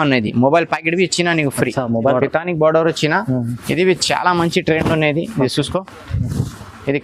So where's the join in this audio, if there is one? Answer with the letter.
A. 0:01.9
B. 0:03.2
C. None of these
A